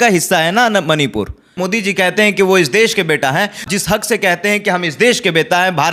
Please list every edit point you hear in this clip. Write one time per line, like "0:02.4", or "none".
0:01.6
0:03.7